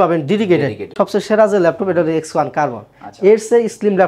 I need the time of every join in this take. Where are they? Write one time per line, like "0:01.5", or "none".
0:00.9